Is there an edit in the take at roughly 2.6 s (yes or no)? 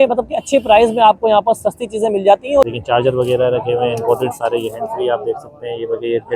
yes